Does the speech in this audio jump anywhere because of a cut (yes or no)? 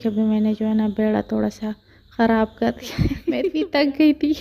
yes